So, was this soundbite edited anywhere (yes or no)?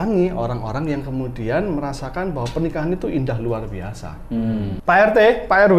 yes